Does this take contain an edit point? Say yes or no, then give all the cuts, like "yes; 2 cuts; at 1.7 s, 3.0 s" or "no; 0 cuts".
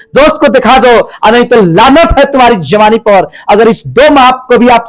no; 0 cuts